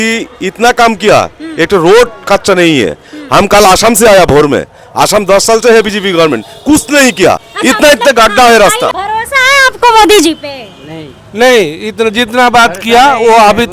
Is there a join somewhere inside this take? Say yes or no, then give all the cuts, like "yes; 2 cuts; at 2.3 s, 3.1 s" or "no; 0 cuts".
yes; 2 cuts; at 7.5 s, 8.9 s